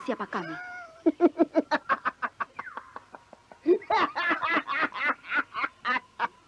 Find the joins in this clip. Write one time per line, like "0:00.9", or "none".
none